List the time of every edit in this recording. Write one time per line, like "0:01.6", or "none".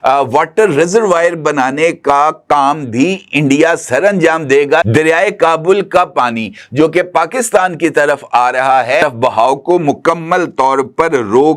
0:04.8
0:09.0

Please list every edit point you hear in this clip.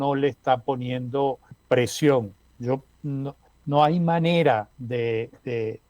0:01.5
0:02.4
0:03.5

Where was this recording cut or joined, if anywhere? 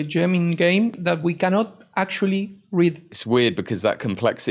0:01.0
0:03.1

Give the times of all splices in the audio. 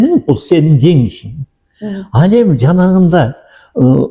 none

